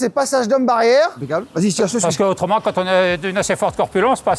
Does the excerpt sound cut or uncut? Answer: uncut